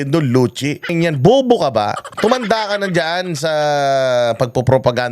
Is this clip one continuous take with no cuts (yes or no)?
no